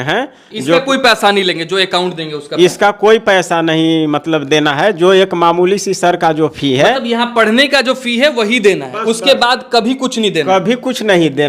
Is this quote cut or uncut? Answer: uncut